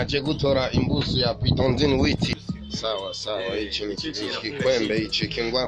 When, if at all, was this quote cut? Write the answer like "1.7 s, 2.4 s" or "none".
2.3 s